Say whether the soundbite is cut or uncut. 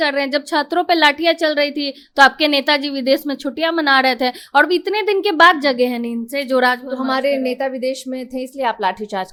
uncut